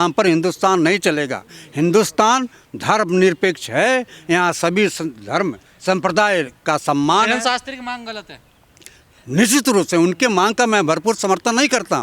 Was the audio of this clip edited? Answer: no; 0 cuts

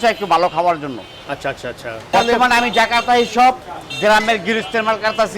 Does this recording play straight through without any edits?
yes; 0 cuts

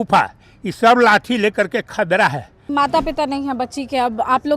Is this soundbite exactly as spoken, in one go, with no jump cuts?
no; 1 cut; at 2.6 s

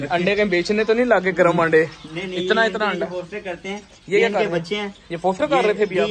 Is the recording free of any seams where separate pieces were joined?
yes; 0 cuts

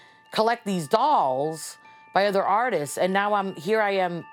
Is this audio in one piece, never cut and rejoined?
yes; 0 cuts

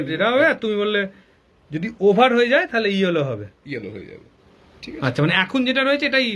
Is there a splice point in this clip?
no; 0 cuts

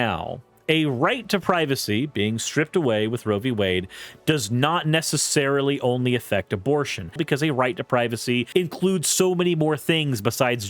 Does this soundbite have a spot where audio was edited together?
yes; 2 cuts; at 7.2 s, 8.5 s

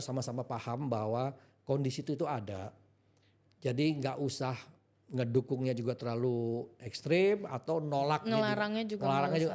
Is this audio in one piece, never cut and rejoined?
yes; 0 cuts

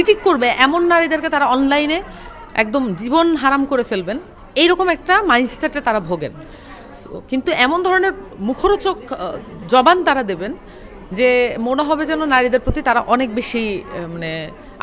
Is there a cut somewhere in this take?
no; 0 cuts

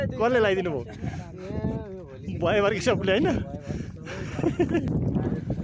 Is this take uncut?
yes; 0 cuts

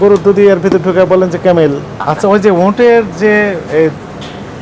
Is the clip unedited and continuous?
no; 1 cut; at 1.9 s

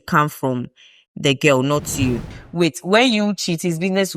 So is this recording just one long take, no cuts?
no; 1 cut; at 2.3 s

